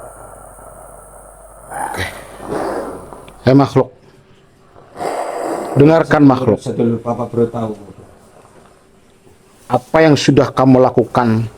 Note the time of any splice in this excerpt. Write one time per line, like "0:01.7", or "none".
0:01.8